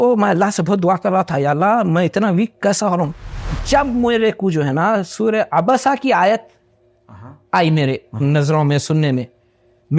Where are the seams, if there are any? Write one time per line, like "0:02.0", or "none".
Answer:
0:03.5